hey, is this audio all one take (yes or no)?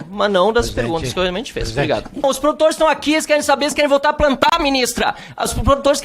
no